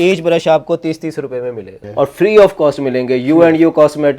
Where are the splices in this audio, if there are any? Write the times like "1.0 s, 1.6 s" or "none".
1.8 s